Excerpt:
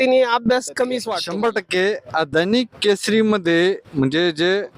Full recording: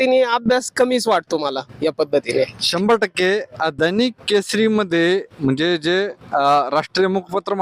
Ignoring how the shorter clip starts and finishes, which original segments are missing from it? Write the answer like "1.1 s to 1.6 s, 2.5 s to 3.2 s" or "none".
1.1 s to 2.6 s